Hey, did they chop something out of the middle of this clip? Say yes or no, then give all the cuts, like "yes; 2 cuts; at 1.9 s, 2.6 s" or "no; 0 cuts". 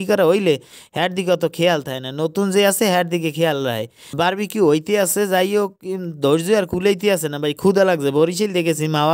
no; 0 cuts